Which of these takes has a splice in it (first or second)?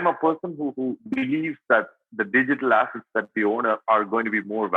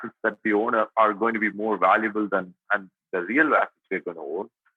first